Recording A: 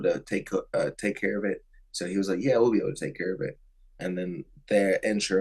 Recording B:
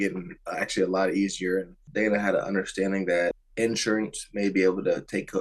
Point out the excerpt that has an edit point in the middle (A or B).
B